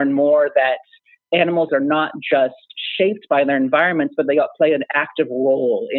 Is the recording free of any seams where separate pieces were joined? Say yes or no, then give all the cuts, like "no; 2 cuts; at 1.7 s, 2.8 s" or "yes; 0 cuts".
no; 1 cut; at 1.7 s